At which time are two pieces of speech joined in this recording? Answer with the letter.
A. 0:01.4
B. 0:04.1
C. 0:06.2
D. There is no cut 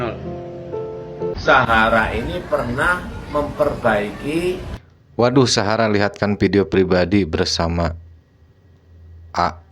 A